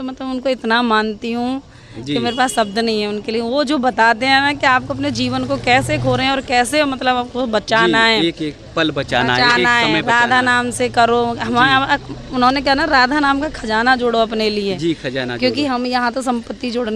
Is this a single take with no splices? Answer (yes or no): yes